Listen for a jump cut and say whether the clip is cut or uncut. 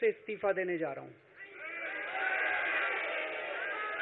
uncut